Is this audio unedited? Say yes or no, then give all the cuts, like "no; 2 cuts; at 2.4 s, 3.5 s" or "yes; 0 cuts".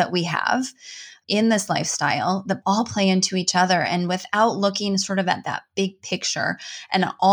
no; 2 cuts; at 1.2 s, 2.6 s